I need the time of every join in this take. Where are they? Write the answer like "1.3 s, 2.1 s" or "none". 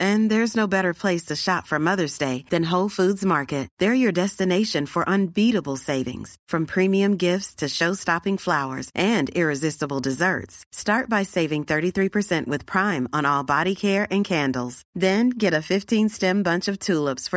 none